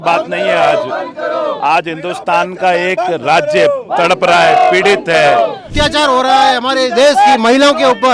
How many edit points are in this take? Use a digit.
1